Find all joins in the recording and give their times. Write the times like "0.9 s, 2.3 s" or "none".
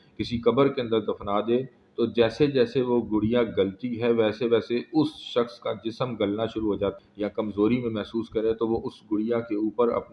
7.0 s

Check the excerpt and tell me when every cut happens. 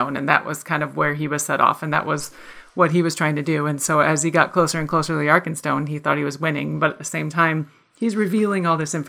none

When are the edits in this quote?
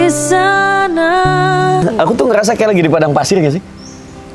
1.8 s

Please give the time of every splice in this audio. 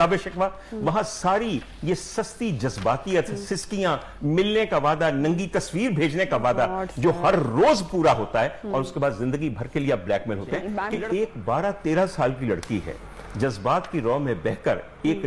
10.9 s

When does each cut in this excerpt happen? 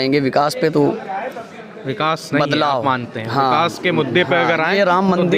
none

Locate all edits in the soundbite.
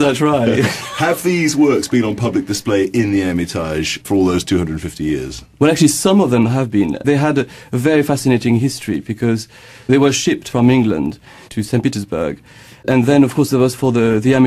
12.2 s

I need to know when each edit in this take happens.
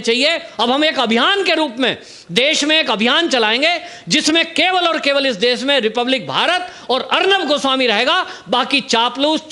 none

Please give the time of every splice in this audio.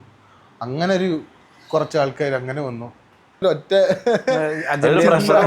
3.4 s

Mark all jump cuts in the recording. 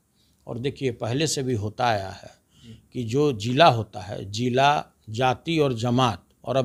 none

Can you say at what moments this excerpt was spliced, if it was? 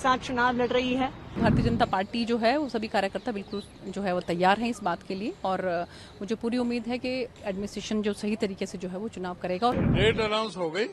1.4 s, 9.8 s

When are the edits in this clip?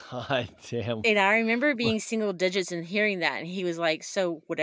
none

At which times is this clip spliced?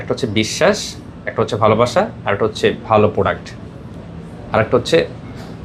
none

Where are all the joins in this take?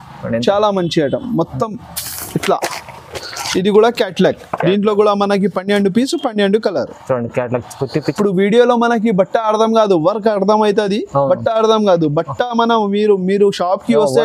8.1 s

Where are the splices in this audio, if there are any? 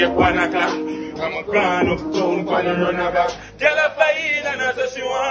none

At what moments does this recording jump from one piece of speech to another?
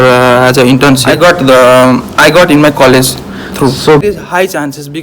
4.0 s

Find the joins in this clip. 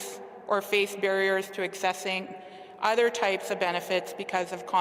none

